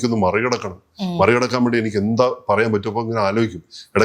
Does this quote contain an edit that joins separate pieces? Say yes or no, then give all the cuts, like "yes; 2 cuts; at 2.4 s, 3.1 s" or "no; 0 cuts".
no; 0 cuts